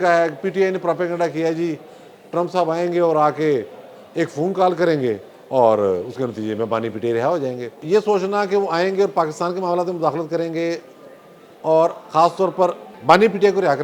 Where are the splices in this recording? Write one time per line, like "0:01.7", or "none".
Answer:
0:07.8
0:12.9